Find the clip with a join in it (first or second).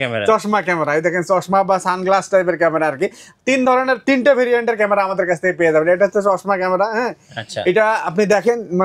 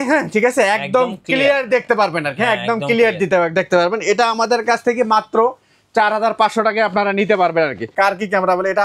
second